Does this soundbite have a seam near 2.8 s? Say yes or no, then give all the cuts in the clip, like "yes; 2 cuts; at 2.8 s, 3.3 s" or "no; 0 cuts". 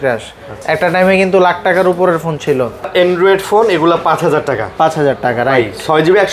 yes; 1 cut; at 2.8 s